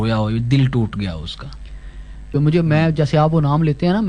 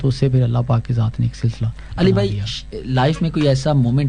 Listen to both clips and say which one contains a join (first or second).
first